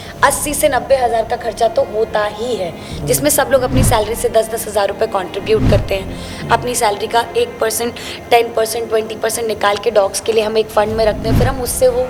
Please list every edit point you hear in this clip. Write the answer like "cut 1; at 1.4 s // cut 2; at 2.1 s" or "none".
none